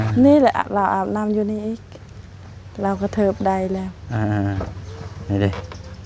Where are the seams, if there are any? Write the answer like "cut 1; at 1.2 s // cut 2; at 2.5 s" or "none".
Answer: none